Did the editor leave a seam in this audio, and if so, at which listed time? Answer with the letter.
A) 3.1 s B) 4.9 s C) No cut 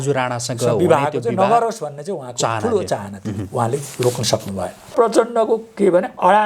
B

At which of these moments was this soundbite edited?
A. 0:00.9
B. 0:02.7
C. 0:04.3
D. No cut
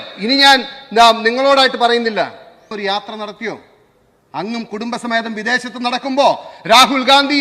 B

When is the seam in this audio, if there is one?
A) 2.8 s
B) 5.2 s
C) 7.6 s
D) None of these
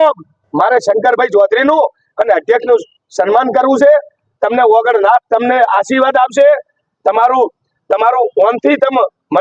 D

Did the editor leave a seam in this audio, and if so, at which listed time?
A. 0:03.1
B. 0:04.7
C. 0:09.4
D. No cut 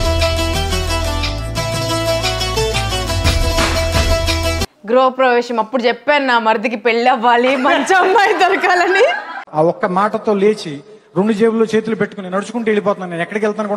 B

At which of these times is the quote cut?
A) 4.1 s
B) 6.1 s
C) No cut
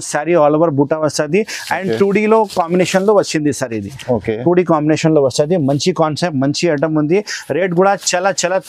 C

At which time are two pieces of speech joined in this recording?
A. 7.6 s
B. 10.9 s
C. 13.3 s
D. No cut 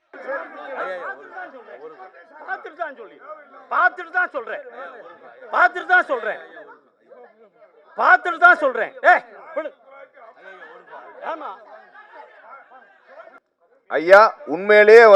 C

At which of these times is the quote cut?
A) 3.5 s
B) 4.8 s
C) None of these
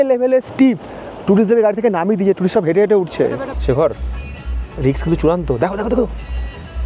A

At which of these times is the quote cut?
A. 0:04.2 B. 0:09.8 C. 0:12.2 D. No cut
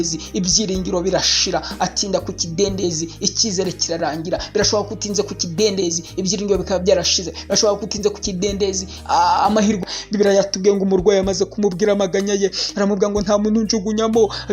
B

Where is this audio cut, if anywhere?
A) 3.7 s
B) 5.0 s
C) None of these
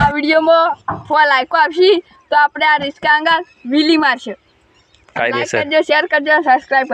C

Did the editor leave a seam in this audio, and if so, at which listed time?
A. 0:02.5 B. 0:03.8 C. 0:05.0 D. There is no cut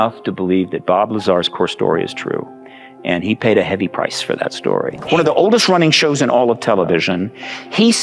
C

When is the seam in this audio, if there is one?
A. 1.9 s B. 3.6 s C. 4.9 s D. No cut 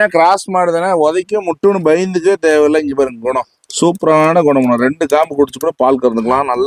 D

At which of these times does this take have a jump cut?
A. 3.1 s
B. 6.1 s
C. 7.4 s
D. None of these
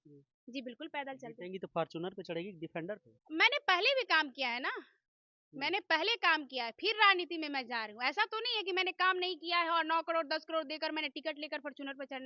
A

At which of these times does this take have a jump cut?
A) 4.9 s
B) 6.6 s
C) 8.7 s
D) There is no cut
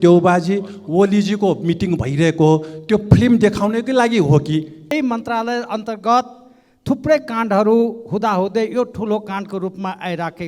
A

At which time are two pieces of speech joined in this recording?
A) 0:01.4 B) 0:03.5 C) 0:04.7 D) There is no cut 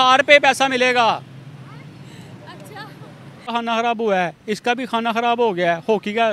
B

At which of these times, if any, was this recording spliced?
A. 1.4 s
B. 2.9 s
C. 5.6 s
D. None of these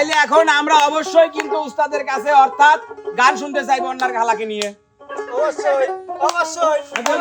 D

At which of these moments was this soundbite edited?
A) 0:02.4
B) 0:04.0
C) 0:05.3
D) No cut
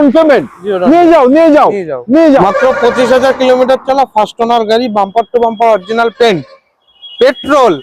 A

